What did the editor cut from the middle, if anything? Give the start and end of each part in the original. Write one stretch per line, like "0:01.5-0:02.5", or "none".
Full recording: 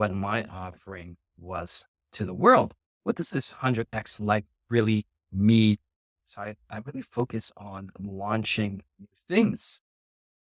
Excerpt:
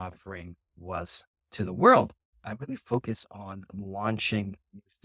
0:02.9-0:06.5